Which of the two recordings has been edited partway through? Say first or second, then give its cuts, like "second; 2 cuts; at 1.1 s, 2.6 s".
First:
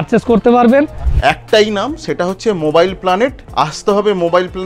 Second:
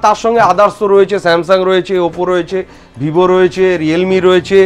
first; 2 cuts; at 1.1 s, 3.4 s